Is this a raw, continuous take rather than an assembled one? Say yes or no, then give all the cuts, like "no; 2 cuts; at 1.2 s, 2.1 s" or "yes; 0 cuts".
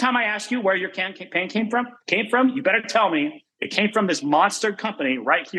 yes; 0 cuts